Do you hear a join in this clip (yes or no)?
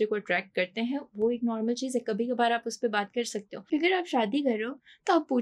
yes